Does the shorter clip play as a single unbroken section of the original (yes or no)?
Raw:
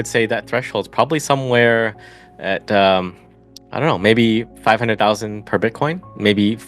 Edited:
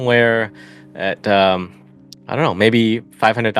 yes